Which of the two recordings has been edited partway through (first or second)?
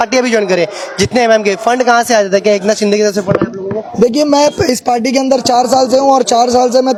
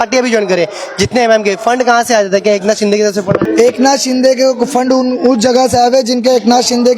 second